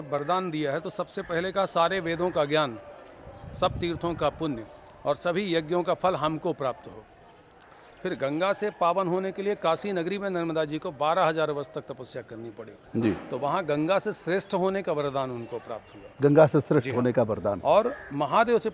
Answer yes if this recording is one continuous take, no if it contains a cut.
yes